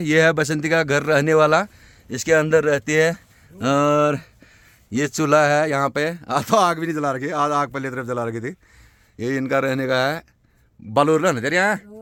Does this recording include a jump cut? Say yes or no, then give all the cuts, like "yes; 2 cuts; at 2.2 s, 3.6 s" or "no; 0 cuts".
no; 0 cuts